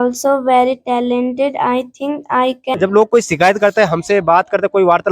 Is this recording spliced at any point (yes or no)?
yes